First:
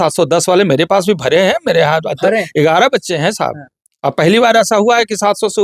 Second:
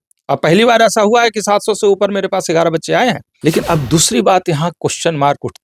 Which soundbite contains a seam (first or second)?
second